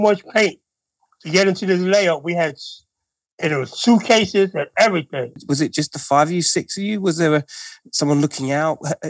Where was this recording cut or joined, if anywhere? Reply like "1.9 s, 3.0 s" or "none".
5.4 s